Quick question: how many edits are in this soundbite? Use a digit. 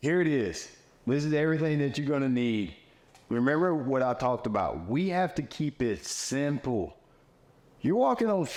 0